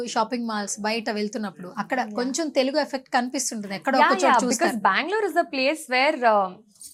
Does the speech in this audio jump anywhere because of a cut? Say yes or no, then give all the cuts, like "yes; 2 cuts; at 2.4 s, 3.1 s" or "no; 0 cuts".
no; 0 cuts